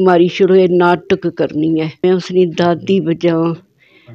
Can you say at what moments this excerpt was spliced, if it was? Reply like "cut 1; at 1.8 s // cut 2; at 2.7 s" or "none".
cut 1; at 2.0 s